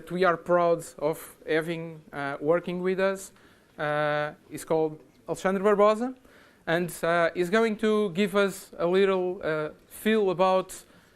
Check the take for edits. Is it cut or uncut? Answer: cut